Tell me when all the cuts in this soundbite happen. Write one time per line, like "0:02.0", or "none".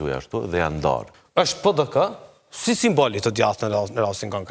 0:01.2